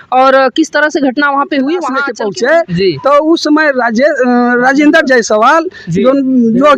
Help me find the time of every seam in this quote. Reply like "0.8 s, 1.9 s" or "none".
2.1 s